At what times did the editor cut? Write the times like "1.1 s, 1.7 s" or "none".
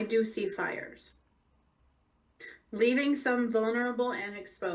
3.0 s

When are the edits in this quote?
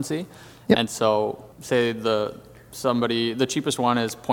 1.5 s

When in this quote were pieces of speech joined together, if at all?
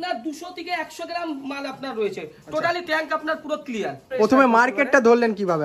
4.1 s

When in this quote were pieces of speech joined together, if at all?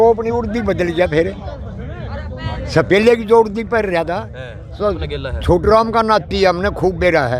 5.0 s

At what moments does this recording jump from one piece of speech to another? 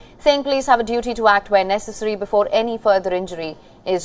none

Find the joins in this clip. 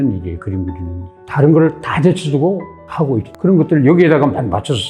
3.3 s

